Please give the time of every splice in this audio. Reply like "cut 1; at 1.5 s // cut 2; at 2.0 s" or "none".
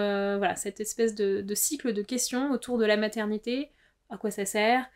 none